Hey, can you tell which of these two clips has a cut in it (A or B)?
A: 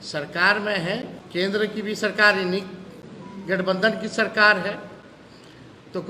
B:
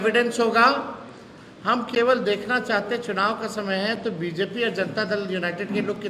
A